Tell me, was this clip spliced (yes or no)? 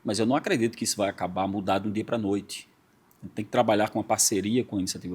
no